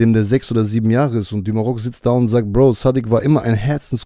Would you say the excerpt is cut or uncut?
uncut